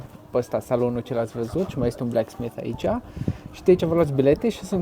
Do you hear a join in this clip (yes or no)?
no